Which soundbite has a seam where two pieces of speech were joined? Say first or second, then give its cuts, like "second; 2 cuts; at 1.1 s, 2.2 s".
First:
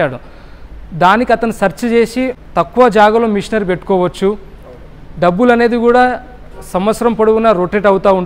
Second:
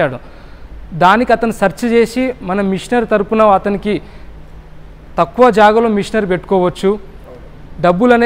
first; 1 cut; at 2.4 s